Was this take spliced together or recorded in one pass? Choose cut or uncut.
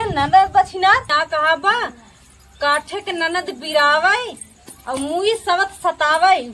cut